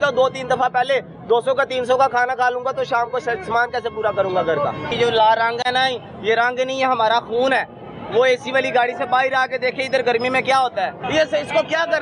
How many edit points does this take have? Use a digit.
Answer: 2